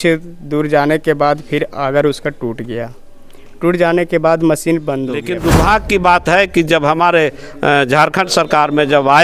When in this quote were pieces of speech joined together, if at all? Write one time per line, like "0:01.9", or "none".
0:05.2